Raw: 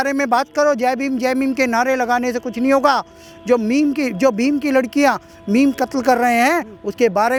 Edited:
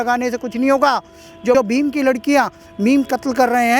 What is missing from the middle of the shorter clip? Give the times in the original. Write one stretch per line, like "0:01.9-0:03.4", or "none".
0:03.6-0:04.2